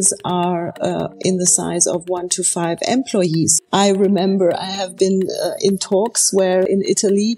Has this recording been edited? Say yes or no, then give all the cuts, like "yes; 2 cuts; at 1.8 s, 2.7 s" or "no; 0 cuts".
yes; 2 cuts; at 3.6 s, 6.7 s